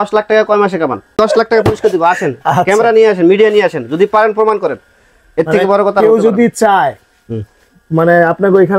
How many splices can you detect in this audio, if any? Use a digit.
1